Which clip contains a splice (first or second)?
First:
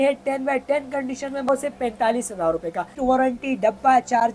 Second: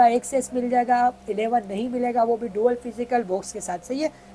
first